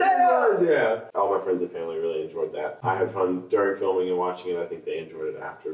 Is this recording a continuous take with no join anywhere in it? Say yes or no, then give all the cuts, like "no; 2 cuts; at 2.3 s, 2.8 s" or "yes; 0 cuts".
no; 2 cuts; at 1.1 s, 2.8 s